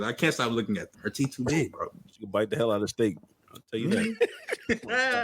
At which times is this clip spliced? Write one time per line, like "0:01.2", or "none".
0:01.0